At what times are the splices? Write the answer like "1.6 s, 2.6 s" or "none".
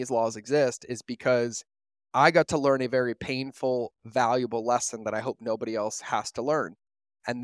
none

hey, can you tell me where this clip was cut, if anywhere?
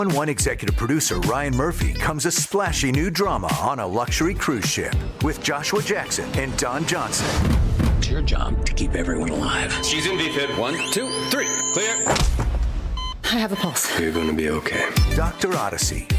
none

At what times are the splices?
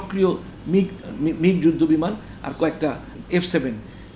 1.0 s, 3.1 s

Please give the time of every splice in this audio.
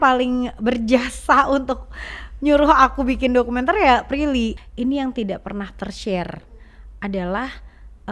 4.6 s

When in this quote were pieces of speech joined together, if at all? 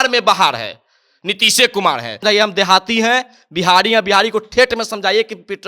2.2 s

